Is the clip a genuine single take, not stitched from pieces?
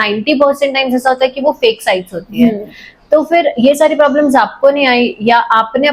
yes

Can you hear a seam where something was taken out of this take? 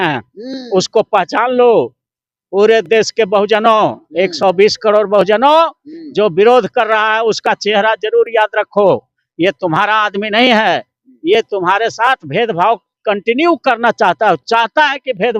no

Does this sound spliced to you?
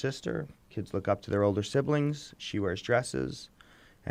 no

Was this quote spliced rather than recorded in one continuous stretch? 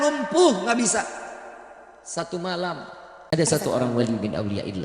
yes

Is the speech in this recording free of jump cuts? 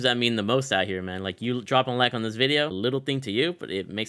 no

